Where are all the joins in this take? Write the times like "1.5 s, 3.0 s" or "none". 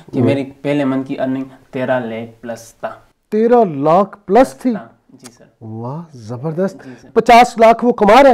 6.9 s